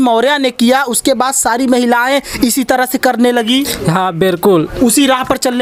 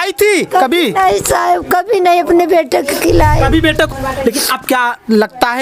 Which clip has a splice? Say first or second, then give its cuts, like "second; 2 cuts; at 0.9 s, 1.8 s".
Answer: second; 1 cut; at 3.9 s